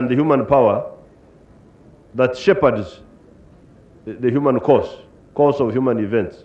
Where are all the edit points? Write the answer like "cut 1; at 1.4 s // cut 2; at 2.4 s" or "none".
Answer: none